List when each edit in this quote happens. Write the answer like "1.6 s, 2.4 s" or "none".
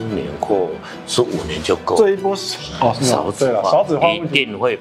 2.6 s